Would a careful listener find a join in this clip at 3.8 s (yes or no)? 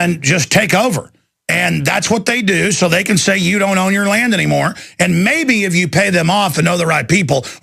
yes